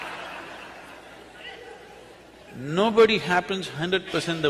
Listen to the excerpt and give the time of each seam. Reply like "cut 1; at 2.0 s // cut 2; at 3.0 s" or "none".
cut 1; at 3.2 s